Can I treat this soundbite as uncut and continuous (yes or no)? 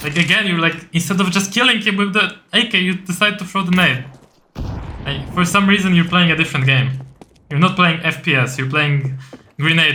yes